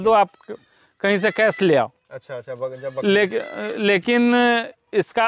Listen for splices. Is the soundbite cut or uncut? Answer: uncut